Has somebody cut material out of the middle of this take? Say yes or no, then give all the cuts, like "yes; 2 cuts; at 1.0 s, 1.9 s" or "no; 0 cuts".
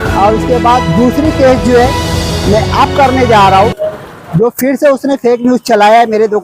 no; 0 cuts